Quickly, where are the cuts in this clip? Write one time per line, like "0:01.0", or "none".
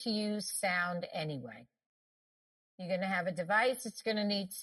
none